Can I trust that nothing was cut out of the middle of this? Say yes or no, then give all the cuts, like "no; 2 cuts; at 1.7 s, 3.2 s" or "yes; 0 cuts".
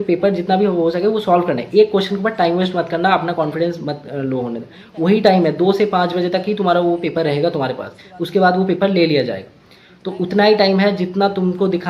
yes; 0 cuts